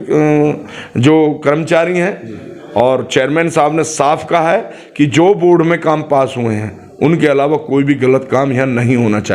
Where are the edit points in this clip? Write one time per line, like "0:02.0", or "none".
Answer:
none